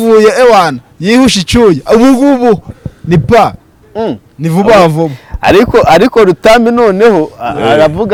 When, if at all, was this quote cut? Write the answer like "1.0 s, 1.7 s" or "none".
none